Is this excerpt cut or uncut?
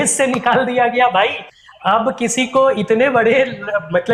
uncut